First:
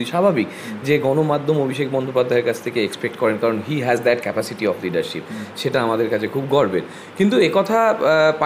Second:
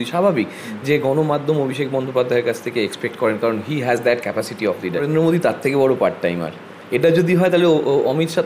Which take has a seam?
second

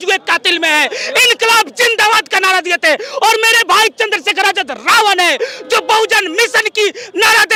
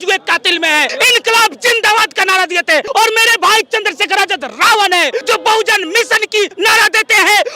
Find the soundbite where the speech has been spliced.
second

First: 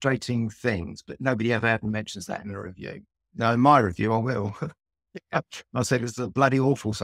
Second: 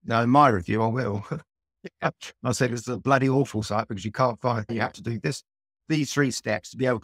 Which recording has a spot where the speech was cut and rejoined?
second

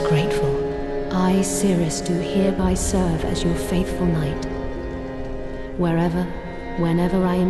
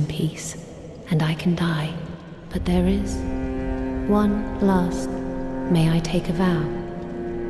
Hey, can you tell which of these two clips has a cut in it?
first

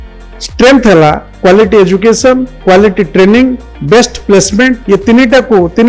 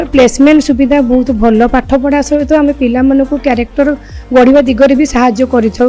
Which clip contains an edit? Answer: first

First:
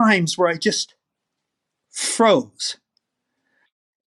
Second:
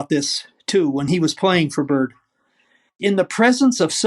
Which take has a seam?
second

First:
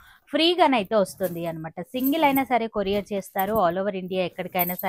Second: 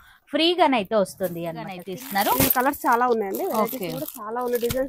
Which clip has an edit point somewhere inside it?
second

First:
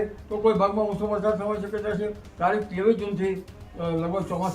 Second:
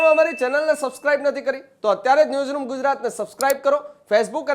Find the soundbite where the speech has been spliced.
first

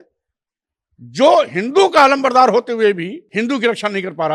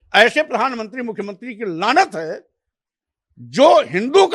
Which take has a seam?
first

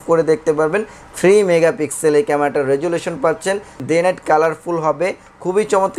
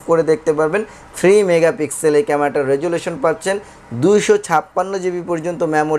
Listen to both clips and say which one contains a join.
first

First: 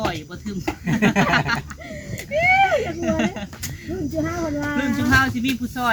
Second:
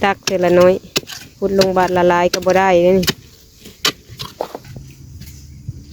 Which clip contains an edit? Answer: second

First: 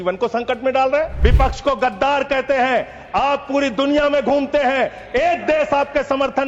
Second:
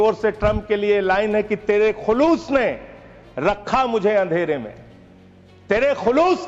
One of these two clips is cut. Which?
first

